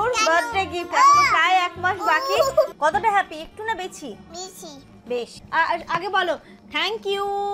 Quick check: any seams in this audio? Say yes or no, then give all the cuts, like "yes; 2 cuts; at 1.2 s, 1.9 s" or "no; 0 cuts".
yes; 2 cuts; at 2.7 s, 5.4 s